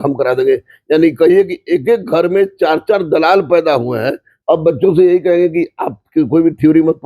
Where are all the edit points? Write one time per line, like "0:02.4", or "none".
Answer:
0:04.3